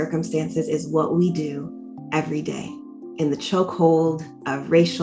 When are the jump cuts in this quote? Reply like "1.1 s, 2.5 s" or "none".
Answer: 3.2 s